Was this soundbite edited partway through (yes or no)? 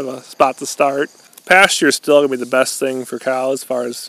yes